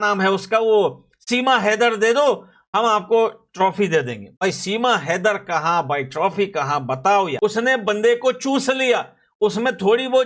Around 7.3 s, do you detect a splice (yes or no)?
yes